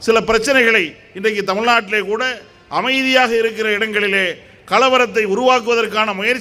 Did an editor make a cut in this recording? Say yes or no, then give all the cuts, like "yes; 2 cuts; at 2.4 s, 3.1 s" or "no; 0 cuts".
no; 0 cuts